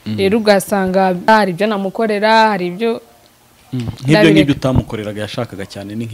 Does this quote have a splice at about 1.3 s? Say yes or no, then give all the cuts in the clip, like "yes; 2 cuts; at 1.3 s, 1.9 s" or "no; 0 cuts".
yes; 1 cut; at 1.3 s